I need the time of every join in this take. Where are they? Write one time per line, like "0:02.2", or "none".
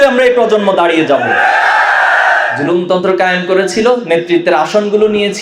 0:02.5